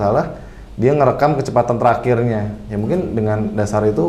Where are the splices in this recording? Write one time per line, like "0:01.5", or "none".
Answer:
none